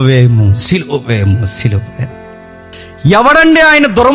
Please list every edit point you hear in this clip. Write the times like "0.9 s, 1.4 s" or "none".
2.8 s